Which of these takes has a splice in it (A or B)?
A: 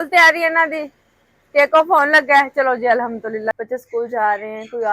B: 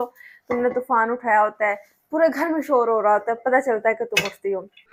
A